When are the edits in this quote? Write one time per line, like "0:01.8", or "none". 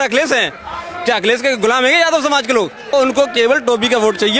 0:02.9